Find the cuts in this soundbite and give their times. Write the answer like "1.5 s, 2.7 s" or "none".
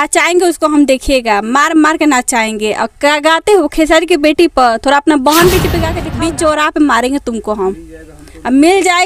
6.0 s

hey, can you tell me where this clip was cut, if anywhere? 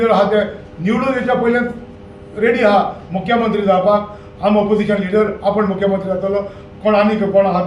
none

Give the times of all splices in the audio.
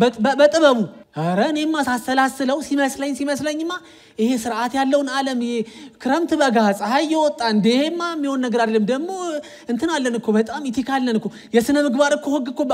1.0 s

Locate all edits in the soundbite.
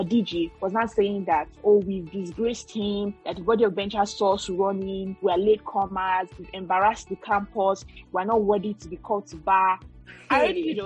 none

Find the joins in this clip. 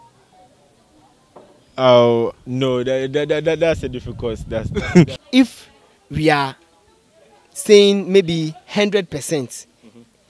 5.2 s

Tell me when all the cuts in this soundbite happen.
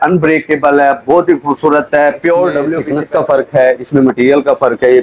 2.8 s

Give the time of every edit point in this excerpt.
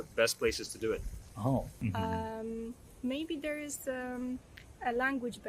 1.7 s

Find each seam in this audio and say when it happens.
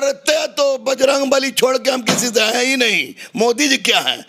none

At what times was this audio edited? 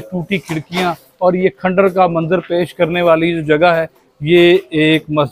none

